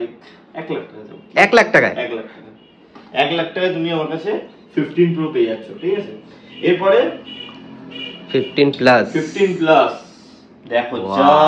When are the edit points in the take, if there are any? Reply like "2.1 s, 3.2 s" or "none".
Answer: none